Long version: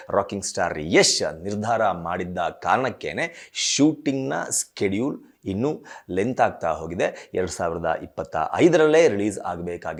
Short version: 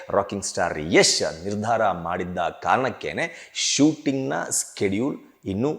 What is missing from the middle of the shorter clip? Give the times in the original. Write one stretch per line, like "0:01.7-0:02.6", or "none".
none